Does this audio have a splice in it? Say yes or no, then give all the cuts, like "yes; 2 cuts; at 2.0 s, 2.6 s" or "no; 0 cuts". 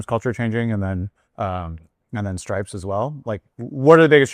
yes; 2 cuts; at 1.2 s, 3.5 s